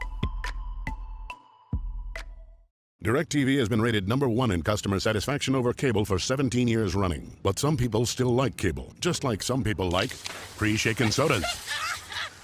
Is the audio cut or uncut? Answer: cut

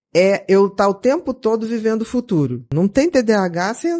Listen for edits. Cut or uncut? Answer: cut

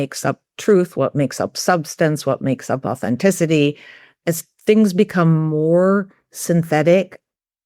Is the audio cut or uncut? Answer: cut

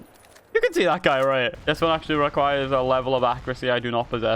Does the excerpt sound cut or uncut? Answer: cut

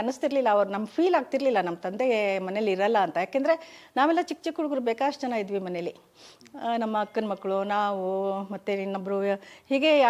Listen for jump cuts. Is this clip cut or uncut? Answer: uncut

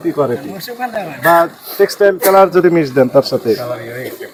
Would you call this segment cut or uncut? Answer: uncut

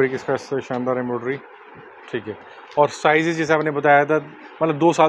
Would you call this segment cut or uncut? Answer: uncut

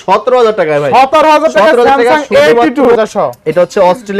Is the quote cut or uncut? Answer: cut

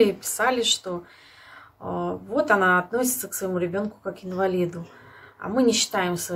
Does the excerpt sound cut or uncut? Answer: uncut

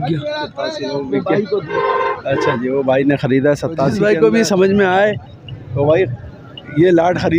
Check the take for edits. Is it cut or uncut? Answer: cut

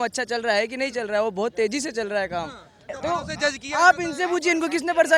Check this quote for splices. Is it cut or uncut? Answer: cut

